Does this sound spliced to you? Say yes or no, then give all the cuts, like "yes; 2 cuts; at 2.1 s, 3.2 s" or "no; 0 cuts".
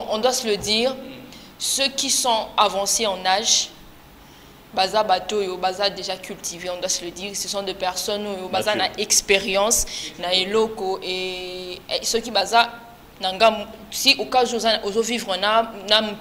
no; 0 cuts